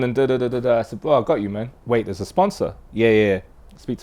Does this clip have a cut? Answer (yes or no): yes